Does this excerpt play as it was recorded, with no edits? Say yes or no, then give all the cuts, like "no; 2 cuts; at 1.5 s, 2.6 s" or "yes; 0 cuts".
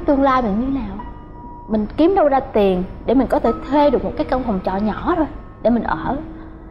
yes; 0 cuts